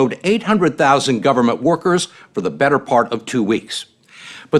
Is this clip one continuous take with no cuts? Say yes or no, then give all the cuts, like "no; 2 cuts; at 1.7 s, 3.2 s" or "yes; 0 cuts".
yes; 0 cuts